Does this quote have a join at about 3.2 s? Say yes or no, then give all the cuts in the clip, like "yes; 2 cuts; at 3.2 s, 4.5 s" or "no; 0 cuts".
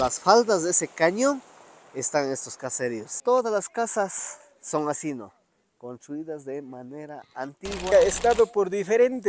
yes; 2 cuts; at 3.2 s, 7.9 s